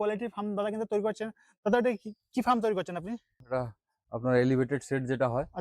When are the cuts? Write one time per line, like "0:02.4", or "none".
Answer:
0:03.4